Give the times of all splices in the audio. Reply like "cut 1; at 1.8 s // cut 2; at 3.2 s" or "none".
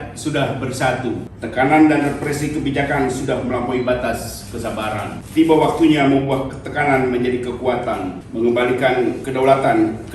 cut 1; at 1.3 s // cut 2; at 5.2 s // cut 3; at 8.2 s // cut 4; at 9.2 s

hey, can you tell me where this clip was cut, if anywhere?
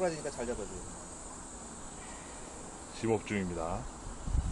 none

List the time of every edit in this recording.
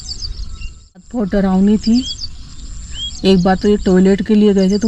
cut 1; at 1.1 s

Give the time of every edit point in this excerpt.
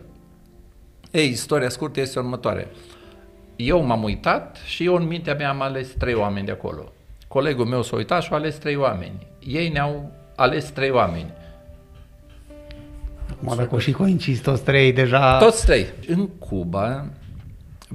cut 1; at 16.0 s

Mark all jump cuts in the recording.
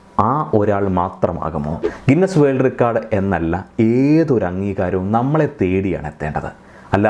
cut 1; at 1.8 s

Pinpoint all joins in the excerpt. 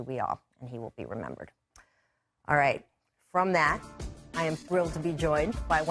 cut 1; at 4.5 s

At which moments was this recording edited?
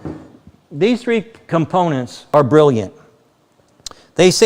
cut 1; at 2.2 s

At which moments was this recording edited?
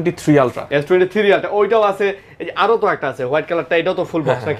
none

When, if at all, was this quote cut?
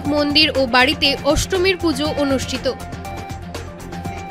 none

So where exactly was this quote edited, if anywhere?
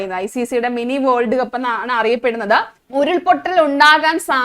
cut 1; at 2.8 s

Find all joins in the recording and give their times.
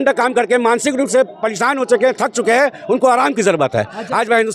none

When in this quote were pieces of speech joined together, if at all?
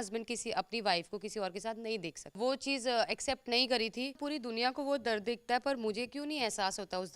cut 1; at 2.4 s // cut 2; at 4.2 s

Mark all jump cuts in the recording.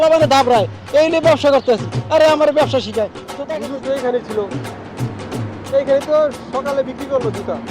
cut 1; at 3.3 s

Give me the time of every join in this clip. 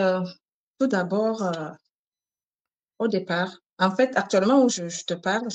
none

